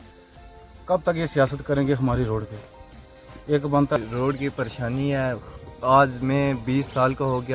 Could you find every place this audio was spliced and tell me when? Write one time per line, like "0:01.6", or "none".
0:04.0